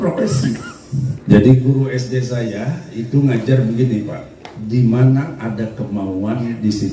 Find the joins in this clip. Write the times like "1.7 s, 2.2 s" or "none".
1.3 s